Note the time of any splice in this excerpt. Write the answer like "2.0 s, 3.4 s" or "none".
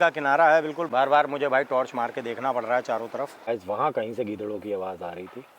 3.5 s